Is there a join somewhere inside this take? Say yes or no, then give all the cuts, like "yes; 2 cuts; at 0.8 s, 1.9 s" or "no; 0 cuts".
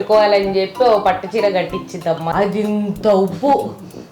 yes; 1 cut; at 2.3 s